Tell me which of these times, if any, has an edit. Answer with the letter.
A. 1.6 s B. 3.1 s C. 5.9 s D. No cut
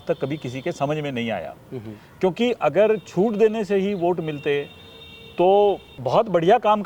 C